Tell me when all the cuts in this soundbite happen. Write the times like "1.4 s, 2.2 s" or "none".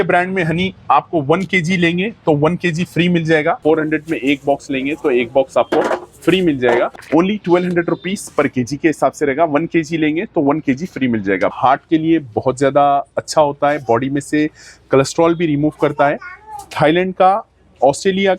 3.6 s, 7.0 s, 11.5 s